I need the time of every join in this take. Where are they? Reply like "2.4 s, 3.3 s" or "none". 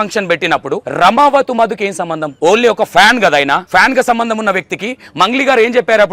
0.8 s, 2.2 s, 3.6 s